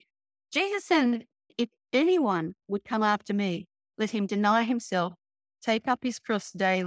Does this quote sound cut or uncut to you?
cut